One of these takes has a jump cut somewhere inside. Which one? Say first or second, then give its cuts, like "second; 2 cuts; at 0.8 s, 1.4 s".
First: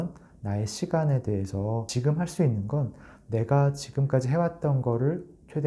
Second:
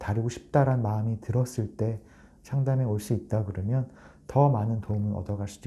first; 1 cut; at 1.9 s